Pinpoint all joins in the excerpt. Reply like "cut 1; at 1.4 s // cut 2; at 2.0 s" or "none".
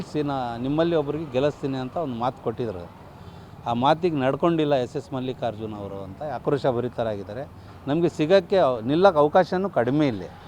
none